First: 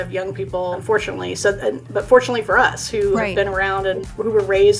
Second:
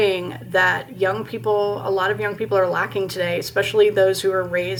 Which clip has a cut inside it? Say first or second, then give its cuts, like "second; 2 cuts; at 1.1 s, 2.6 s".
first; 2 cuts; at 0.8 s, 3.9 s